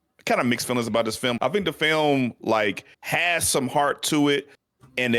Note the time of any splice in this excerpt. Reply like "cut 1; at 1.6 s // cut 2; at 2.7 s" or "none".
cut 1; at 1.4 s // cut 2; at 2.9 s